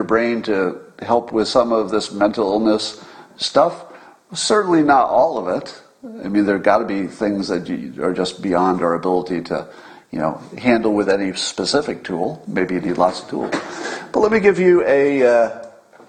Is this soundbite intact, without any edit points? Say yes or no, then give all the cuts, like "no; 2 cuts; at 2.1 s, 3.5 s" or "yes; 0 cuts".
yes; 0 cuts